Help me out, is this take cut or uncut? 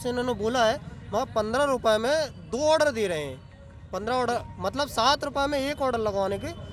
uncut